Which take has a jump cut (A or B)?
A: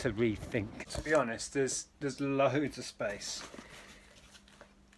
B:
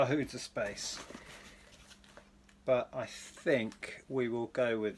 A